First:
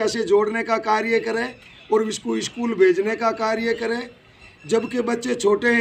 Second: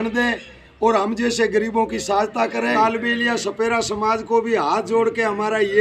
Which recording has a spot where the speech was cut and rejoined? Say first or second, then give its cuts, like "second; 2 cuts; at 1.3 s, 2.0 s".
second; 1 cut; at 2.7 s